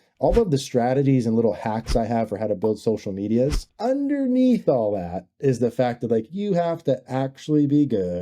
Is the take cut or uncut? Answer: cut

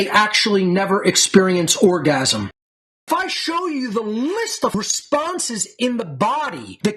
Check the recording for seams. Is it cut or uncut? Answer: cut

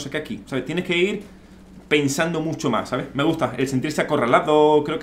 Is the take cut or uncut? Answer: uncut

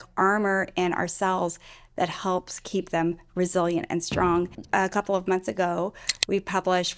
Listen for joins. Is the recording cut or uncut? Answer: cut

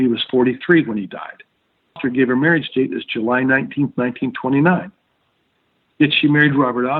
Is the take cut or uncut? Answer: cut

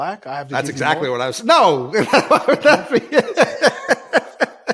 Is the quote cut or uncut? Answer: uncut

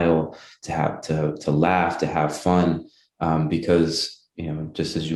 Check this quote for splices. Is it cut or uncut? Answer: uncut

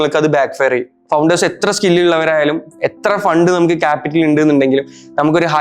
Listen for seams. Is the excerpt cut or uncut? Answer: cut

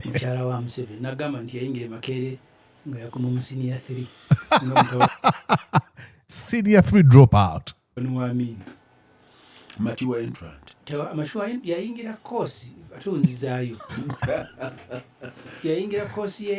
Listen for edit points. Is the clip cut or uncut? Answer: uncut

